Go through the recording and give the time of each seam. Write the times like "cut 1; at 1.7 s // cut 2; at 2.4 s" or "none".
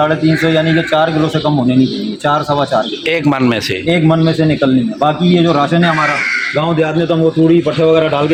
none

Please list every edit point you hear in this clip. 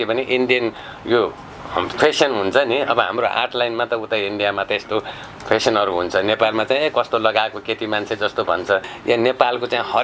cut 1; at 8.9 s

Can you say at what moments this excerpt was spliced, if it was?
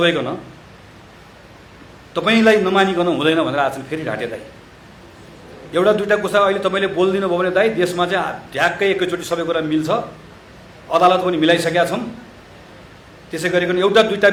none

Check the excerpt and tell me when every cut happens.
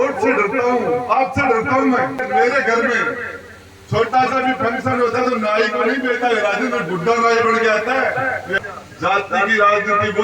cut 1; at 2.2 s // cut 2; at 8.6 s

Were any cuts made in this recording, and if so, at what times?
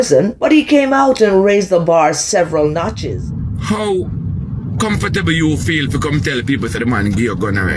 cut 1; at 2.9 s

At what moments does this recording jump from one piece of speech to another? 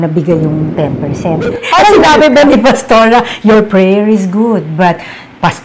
cut 1; at 1.6 s

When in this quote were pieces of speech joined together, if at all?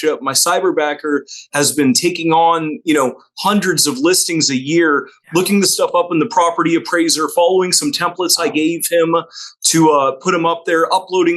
none

